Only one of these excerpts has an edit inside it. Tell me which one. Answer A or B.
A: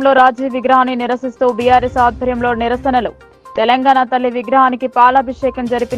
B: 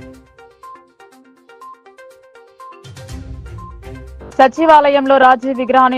B